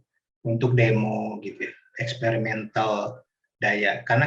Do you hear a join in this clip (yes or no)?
no